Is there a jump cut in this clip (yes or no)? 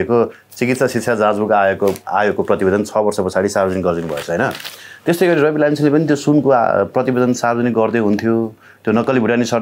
no